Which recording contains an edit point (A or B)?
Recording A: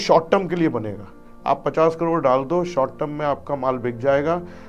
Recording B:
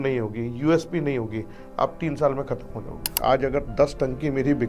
B